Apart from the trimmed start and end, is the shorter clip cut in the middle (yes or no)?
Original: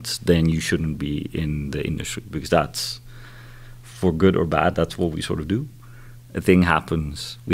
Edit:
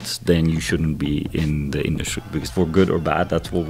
yes